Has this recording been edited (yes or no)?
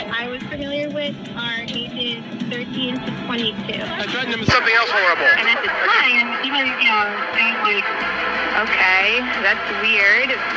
no